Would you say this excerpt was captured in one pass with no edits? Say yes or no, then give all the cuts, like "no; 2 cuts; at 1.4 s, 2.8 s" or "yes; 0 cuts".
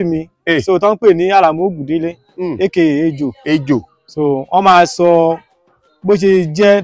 yes; 0 cuts